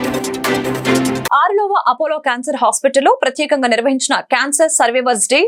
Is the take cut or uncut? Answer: uncut